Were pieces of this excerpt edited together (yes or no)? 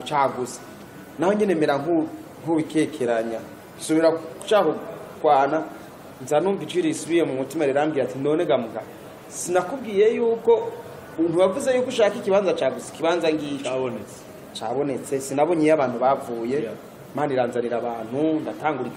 no